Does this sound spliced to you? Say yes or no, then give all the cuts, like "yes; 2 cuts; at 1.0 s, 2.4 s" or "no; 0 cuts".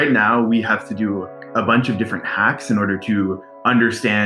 yes; 1 cut; at 1.4 s